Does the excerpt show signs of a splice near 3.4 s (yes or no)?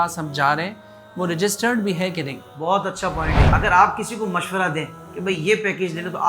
yes